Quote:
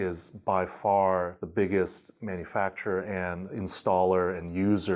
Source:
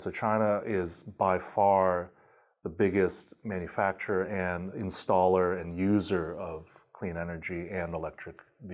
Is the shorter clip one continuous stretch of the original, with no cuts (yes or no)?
no